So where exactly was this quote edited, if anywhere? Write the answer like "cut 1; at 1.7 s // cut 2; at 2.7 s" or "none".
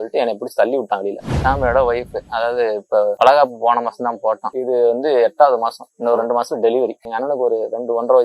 cut 1; at 1.2 s // cut 2; at 3.1 s // cut 3; at 4.5 s // cut 4; at 7.0 s